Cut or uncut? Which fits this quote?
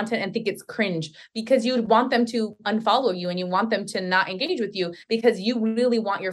uncut